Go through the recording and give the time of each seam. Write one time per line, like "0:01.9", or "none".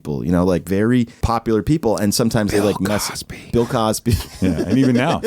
0:01.2